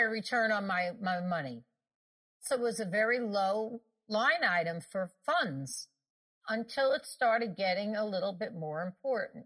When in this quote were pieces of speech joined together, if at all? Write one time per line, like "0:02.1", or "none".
0:02.4
0:04.0
0:05.2
0:06.4